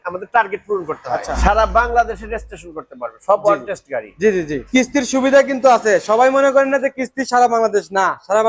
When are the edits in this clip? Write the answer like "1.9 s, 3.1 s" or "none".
1.3 s, 4.6 s